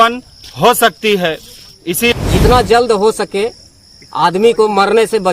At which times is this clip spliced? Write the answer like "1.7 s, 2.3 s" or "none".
2.2 s